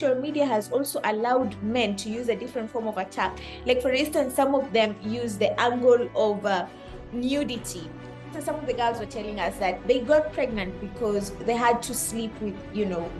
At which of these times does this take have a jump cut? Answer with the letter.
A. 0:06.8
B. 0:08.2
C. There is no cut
B